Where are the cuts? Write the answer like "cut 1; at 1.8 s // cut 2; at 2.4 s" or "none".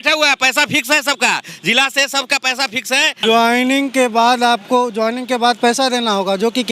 cut 1; at 3.2 s